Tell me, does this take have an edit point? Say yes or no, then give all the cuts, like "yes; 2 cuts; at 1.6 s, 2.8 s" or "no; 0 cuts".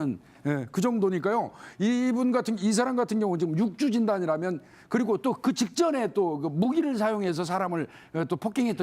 yes; 1 cut; at 2.4 s